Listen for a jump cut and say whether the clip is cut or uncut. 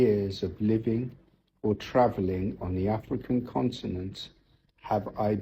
uncut